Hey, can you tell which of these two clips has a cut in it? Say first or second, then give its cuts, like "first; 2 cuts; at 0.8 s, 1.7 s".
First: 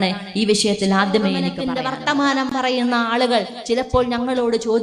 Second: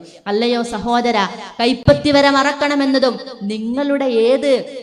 first; 1 cut; at 1.6 s